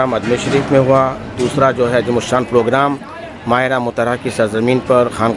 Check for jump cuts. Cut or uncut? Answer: uncut